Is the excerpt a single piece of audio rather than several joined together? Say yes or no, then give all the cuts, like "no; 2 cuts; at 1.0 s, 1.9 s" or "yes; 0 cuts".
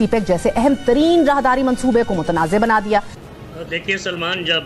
yes; 0 cuts